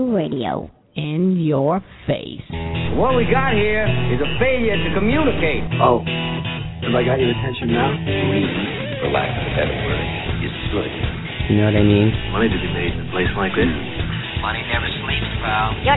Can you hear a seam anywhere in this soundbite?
no; 0 cuts

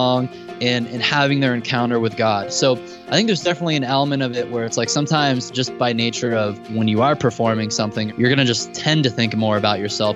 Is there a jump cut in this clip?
yes; 3 cuts; at 6.7 s, 8.1 s, 8.8 s

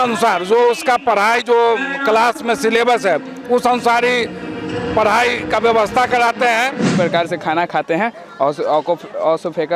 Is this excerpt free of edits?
no; 1 cut; at 6.9 s

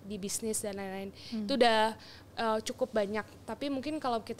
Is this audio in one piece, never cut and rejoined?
yes; 0 cuts

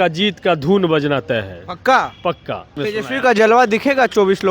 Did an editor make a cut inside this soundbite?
yes; 1 cut; at 2.8 s

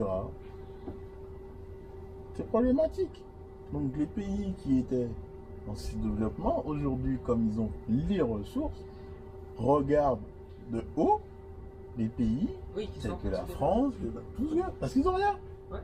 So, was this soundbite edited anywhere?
no; 0 cuts

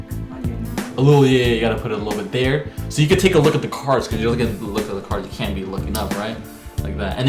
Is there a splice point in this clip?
no; 0 cuts

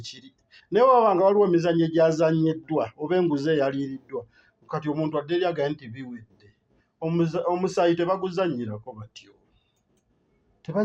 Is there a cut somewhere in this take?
no; 0 cuts

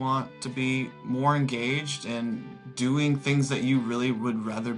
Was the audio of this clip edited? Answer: no; 0 cuts

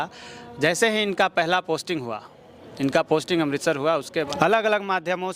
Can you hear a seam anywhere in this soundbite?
yes; 1 cut; at 4.4 s

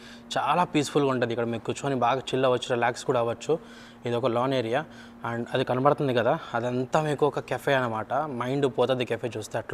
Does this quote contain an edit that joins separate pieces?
no; 0 cuts

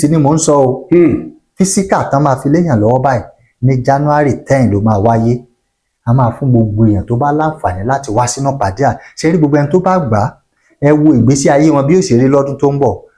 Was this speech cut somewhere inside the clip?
no; 0 cuts

